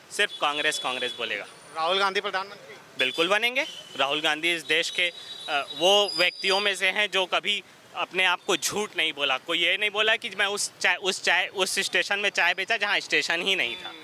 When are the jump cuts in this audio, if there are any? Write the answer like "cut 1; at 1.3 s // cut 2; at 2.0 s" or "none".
none